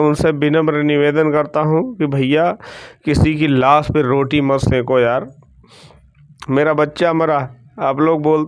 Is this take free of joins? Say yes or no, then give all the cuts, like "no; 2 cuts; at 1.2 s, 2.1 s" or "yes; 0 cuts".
yes; 0 cuts